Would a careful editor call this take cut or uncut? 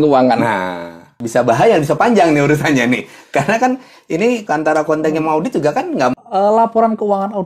cut